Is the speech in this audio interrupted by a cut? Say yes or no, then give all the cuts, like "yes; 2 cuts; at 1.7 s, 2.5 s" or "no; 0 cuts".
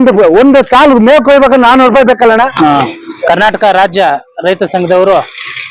yes; 1 cut; at 2.5 s